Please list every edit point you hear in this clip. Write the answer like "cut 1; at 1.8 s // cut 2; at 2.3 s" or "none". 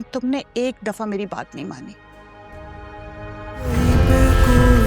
cut 1; at 3.7 s